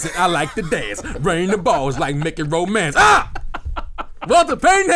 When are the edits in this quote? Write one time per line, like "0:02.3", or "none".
none